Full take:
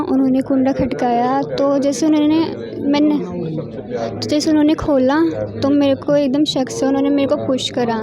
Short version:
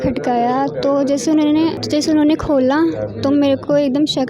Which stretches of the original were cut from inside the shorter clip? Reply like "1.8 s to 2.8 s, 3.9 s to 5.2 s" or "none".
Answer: 2.6 s to 4.2 s